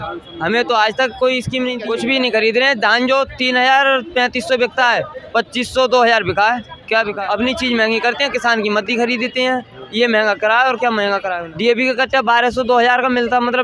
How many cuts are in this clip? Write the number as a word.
three